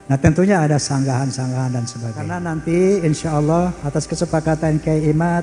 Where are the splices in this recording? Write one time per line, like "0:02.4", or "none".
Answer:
0:02.3

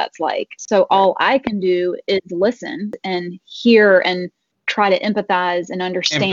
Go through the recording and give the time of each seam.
0:02.9

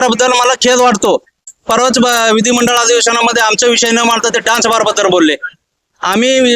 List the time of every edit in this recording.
0:01.5
0:05.5

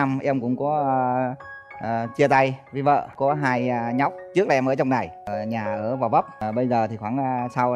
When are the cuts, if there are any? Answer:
none

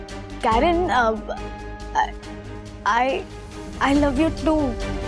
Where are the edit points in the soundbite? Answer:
none

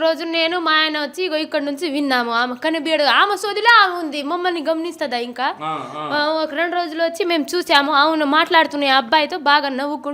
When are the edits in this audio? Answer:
none

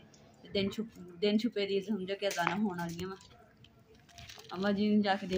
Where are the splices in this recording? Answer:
0:03.3

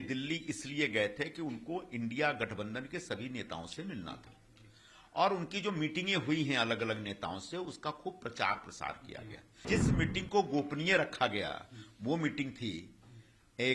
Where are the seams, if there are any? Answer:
0:09.7

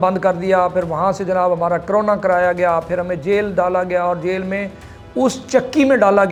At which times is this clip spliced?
none

